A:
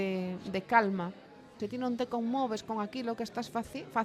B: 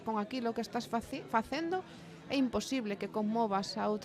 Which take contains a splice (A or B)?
A